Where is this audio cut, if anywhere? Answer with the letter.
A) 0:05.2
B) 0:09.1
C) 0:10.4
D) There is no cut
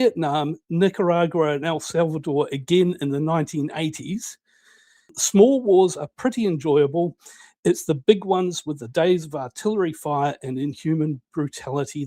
A